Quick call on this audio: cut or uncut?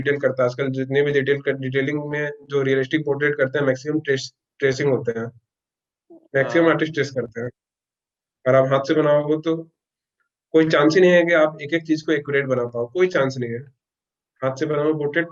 uncut